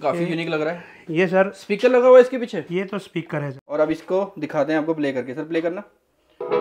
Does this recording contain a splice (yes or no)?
yes